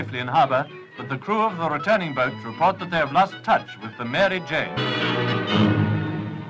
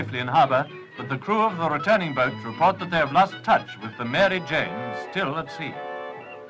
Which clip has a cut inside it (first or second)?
second